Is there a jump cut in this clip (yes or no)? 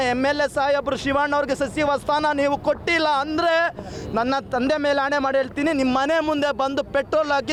no